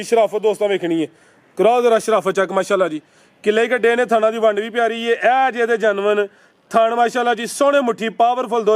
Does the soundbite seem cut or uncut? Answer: uncut